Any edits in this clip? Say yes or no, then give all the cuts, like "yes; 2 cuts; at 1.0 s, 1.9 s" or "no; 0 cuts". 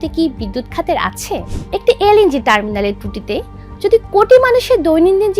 yes; 1 cut; at 1.5 s